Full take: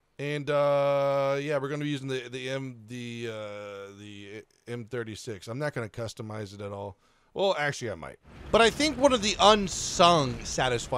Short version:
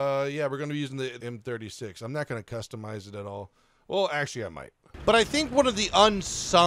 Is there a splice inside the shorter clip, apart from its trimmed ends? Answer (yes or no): yes